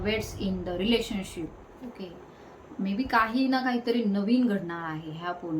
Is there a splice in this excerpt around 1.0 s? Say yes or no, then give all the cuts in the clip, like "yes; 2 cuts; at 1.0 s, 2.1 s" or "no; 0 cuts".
no; 0 cuts